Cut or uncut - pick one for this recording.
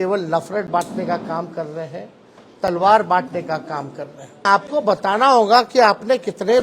cut